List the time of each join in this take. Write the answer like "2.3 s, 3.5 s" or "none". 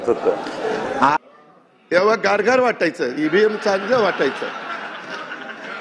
1.2 s